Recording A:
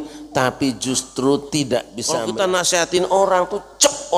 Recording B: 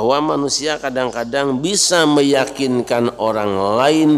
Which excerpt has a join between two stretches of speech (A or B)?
A